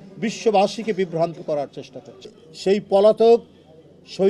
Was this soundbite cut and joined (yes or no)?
yes